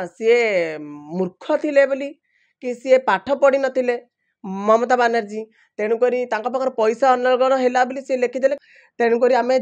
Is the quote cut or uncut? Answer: cut